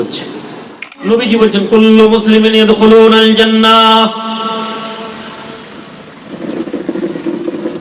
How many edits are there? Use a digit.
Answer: 1